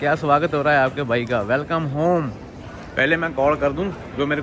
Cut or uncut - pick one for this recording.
uncut